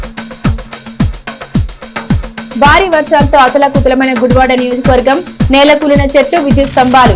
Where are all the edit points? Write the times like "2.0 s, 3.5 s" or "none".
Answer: 1.2 s

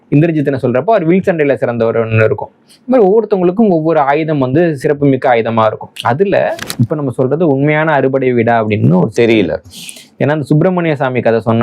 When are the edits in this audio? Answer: 6.7 s

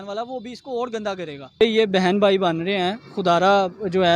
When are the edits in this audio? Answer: 1.6 s

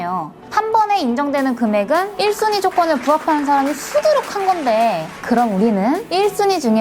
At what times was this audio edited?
2.1 s, 5.1 s

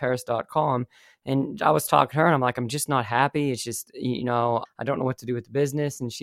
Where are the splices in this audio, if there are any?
4.6 s

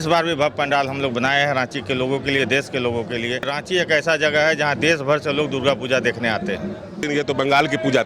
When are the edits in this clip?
3.5 s, 7.0 s

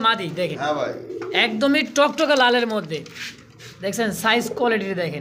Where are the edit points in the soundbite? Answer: none

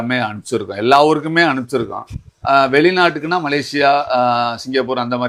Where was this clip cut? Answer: none

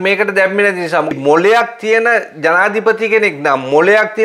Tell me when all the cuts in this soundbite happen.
1.1 s

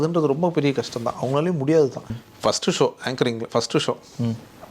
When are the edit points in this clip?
2.2 s

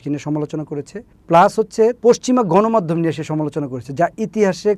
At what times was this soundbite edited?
2.0 s

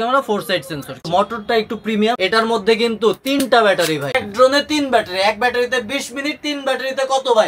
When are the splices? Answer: 1.1 s, 2.2 s, 4.2 s

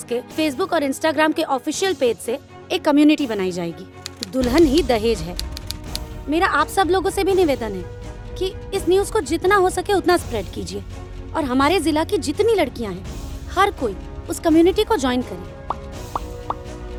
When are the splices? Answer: none

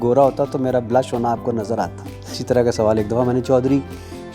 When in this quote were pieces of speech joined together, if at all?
2.4 s

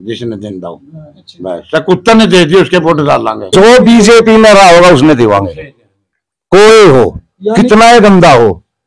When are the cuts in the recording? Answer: 3.5 s

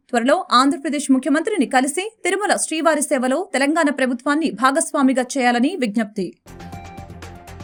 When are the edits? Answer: none

